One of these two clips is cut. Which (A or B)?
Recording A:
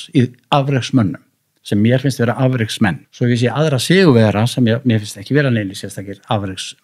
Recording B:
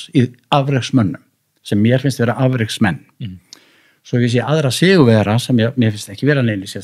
A